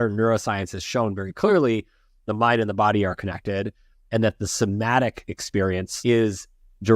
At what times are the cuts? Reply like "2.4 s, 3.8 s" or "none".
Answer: 5.9 s